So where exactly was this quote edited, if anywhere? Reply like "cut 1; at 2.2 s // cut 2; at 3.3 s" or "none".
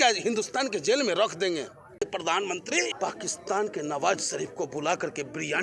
cut 1; at 2.0 s // cut 2; at 2.9 s